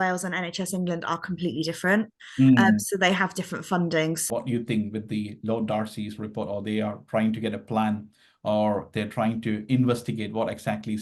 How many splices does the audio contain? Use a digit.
1